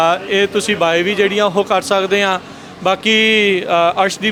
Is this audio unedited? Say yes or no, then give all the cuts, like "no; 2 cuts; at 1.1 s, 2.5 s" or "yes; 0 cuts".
yes; 0 cuts